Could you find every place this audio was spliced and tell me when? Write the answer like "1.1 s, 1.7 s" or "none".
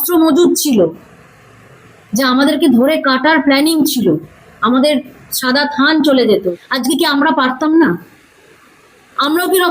6.4 s

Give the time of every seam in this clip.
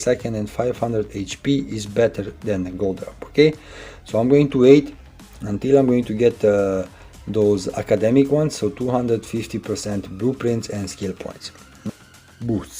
11.9 s

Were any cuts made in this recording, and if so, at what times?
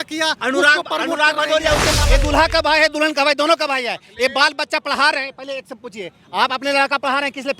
2.0 s

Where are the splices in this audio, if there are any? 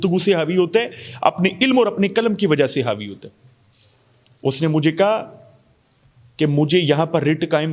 none

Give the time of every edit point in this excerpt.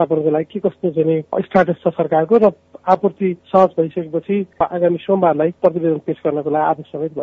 3.4 s, 4.5 s, 5.6 s

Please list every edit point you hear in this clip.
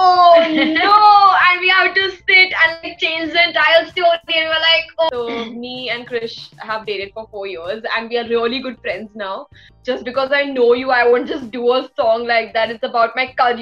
5.1 s, 9.7 s

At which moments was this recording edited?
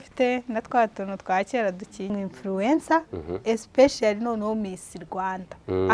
2.1 s

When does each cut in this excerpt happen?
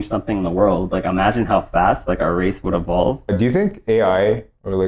3.2 s

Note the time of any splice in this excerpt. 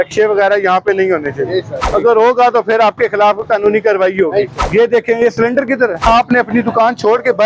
1.8 s, 4.6 s, 6.1 s

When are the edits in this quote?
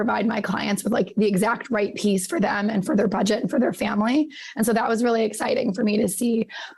none

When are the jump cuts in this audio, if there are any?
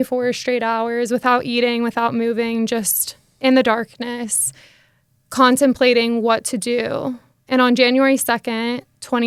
none

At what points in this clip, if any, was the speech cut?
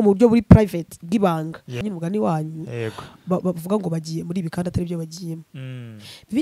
1.8 s

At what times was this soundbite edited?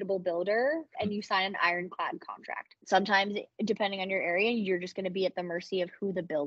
1.0 s, 2.7 s

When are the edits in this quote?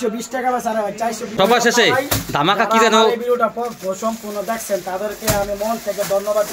1.3 s

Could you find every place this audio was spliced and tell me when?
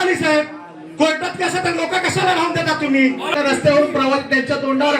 3.3 s

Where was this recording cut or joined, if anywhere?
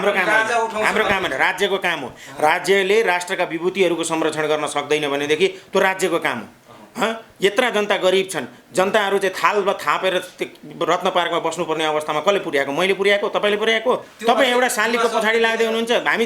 14.1 s

